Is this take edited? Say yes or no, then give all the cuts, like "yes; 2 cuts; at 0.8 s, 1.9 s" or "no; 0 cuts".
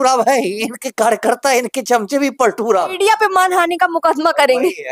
yes; 1 cut; at 2.9 s